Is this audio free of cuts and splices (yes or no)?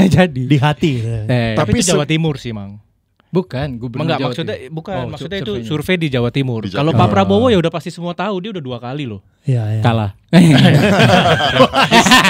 yes